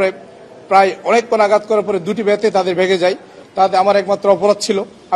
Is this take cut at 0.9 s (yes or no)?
no